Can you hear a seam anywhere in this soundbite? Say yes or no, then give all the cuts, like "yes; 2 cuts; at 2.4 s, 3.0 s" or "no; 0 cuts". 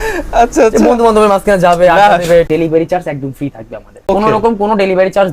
yes; 2 cuts; at 2.5 s, 4.1 s